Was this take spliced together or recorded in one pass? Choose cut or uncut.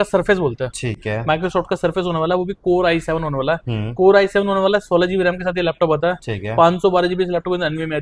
uncut